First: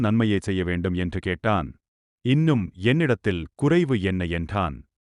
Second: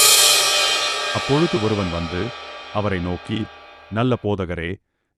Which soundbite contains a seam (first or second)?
second